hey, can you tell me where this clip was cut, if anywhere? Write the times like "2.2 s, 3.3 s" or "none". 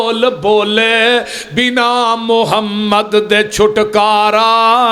none